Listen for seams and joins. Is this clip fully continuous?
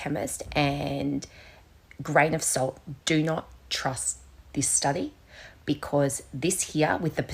yes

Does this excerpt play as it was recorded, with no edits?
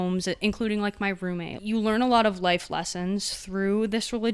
no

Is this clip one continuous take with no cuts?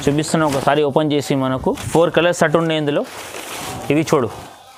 yes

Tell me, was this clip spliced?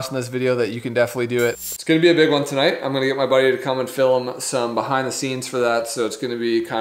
yes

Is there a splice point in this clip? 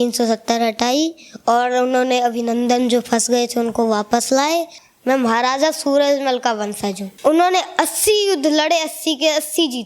yes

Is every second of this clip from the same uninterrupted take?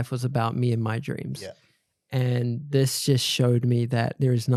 yes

